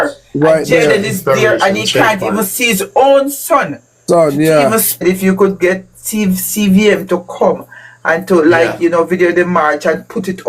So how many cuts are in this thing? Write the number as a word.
one